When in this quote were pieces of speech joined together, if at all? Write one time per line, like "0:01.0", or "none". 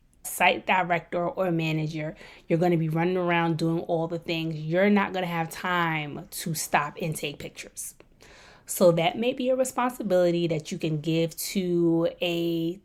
none